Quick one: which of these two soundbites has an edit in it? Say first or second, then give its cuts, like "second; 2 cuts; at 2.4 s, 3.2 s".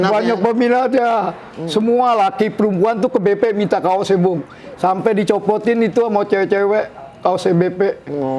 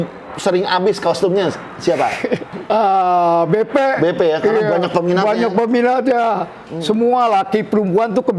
second; 1 cut; at 2.5 s